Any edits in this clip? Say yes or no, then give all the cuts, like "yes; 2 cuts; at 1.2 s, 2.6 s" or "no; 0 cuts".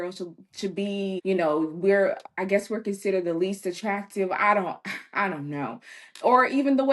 yes; 1 cut; at 1.2 s